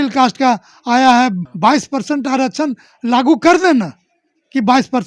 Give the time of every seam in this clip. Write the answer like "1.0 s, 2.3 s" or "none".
1.5 s